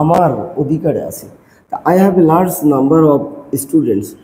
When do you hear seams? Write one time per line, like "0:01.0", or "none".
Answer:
none